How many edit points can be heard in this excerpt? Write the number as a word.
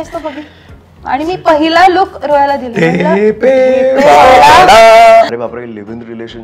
one